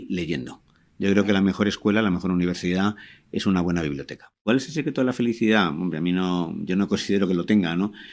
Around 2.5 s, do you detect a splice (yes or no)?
no